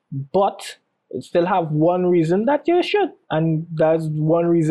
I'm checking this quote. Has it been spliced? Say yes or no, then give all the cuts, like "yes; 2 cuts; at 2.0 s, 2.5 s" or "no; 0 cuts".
yes; 1 cut; at 3.2 s